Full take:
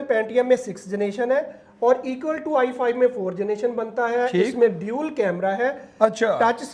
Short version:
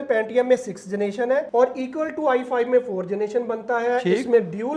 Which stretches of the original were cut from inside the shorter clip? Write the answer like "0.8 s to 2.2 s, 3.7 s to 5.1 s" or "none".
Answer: 1.5 s to 1.8 s